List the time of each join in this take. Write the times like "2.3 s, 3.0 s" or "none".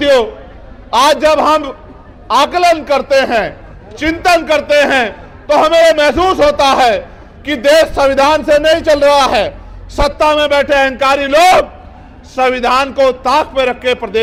none